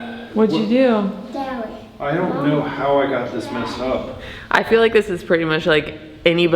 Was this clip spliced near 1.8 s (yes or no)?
no